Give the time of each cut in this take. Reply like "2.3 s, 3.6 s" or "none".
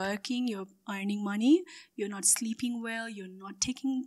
none